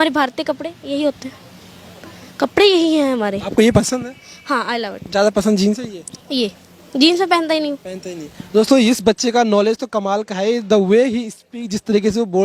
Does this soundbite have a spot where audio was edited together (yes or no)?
no